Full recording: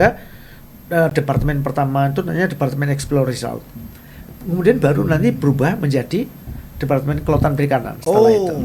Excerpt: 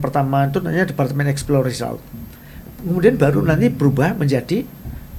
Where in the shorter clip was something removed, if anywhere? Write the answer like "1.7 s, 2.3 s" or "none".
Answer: none